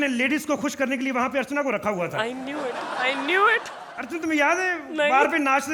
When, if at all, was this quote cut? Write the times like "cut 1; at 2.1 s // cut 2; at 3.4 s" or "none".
none